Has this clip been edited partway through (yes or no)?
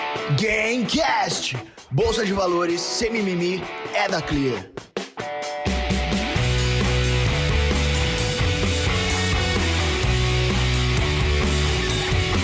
no